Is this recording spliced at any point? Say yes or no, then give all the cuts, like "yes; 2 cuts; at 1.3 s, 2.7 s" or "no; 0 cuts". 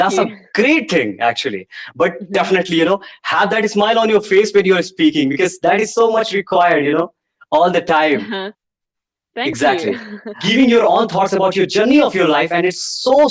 yes; 1 cut; at 10.4 s